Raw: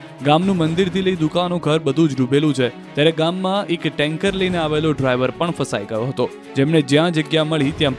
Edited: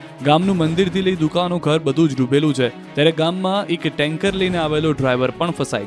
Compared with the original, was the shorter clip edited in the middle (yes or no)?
no